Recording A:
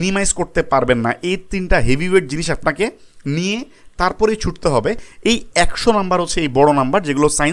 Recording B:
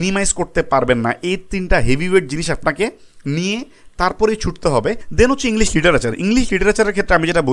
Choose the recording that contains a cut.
B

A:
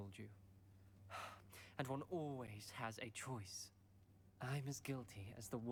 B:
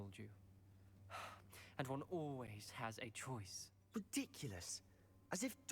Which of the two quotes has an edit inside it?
B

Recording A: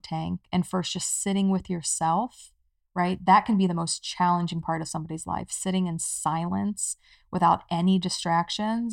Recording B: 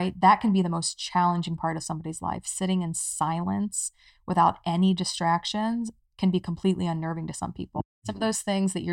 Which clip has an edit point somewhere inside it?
B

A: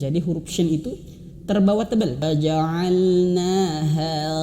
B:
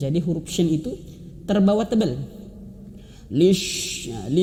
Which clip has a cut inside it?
A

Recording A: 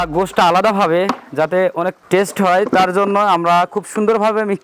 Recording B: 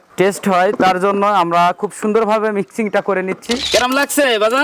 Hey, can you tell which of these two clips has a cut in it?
B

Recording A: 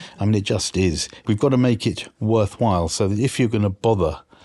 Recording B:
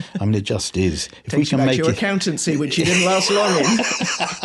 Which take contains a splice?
A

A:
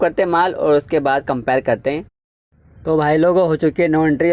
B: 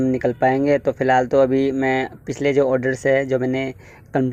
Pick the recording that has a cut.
A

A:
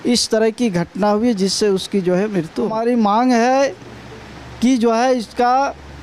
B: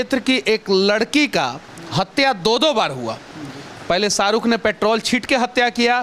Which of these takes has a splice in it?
A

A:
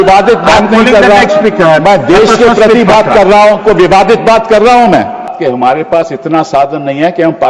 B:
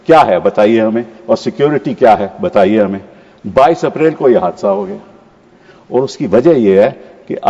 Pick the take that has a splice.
A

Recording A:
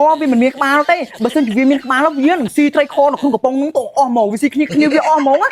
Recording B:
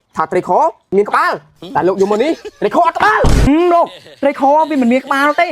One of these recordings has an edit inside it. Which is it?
B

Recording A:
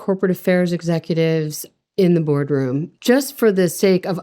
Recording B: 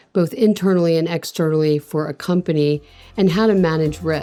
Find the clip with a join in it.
A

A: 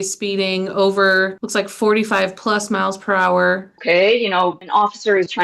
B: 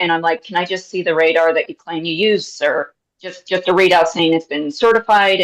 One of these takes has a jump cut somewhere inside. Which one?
A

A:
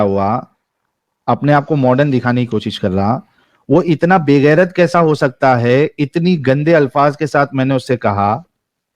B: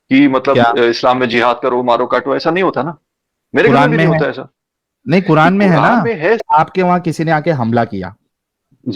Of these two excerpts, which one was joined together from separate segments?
B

